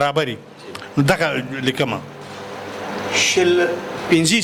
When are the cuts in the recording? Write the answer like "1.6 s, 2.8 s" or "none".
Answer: none